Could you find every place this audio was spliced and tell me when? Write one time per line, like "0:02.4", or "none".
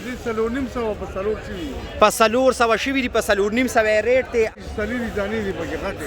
0:04.5